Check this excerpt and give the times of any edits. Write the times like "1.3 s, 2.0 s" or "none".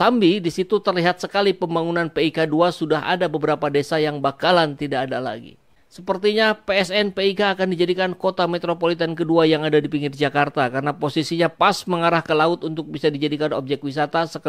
5.7 s